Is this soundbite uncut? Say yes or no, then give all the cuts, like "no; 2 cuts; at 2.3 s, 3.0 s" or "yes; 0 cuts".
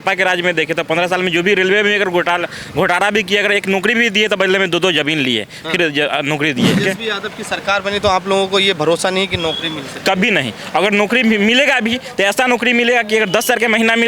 no; 1 cut; at 6.8 s